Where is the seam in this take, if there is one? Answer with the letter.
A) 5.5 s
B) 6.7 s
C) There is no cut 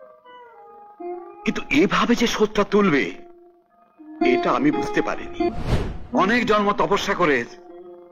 A